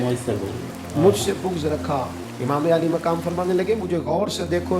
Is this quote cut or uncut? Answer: cut